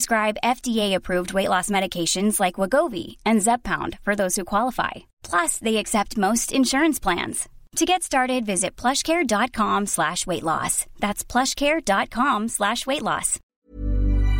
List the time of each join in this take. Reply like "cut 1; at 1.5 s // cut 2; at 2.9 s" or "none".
cut 1; at 13.4 s